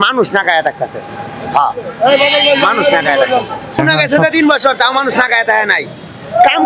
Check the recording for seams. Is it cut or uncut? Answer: cut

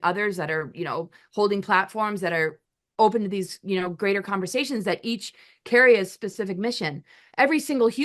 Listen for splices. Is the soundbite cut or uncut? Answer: uncut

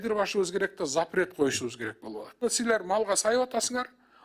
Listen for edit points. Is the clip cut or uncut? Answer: cut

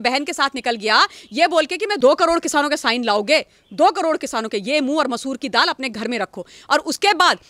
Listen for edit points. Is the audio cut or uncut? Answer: cut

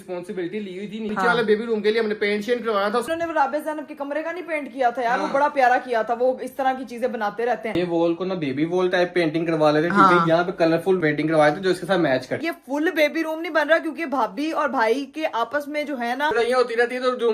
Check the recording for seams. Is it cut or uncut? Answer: cut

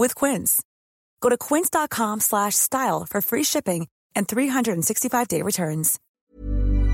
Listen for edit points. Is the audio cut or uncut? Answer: cut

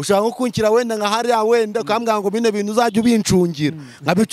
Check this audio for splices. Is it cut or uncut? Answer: uncut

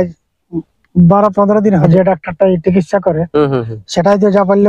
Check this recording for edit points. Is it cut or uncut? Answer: cut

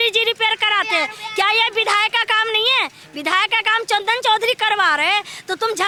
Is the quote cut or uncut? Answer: uncut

